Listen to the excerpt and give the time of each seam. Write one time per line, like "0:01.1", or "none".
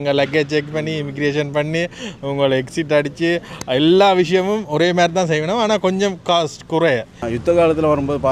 0:07.2